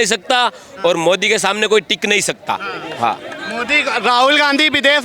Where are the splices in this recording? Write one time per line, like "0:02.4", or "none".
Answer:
none